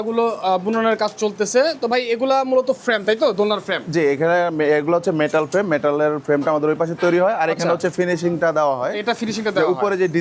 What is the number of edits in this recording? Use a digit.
0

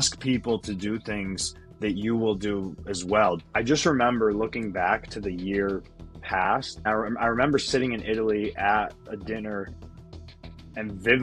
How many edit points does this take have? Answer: 2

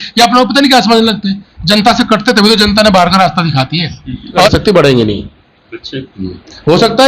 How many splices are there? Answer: 1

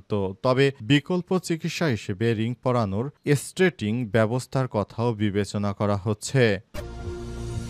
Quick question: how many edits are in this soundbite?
1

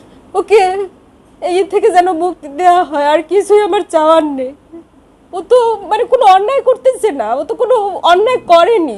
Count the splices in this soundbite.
0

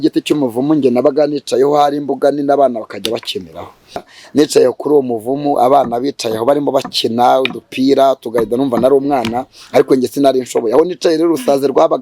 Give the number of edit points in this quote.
1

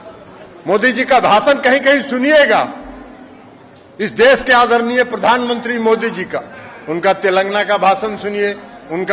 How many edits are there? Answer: 0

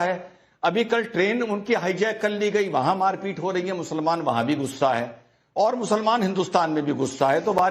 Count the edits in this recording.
0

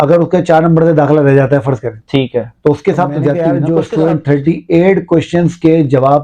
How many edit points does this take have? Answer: 1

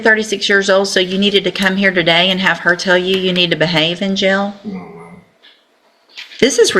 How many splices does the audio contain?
0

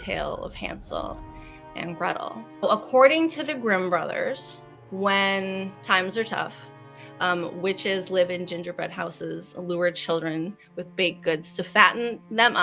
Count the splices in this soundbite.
1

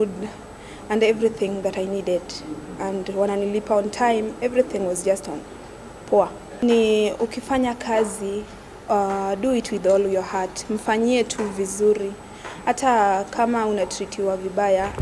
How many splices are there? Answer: 1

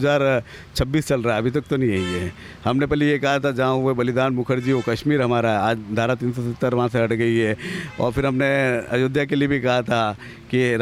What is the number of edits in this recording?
0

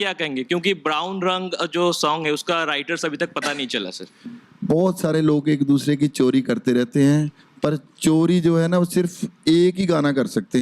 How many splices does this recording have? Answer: 1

